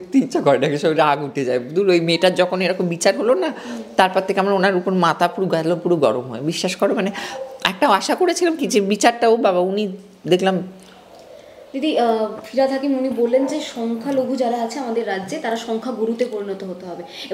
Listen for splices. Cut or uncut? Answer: uncut